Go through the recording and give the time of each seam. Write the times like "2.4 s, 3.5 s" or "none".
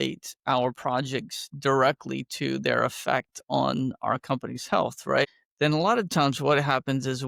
none